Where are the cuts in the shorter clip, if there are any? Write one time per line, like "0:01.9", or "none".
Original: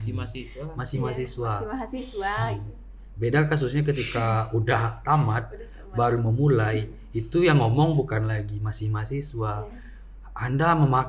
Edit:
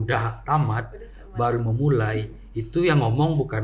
none